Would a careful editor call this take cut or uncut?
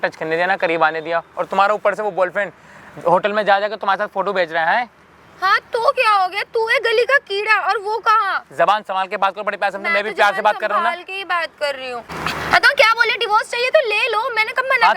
uncut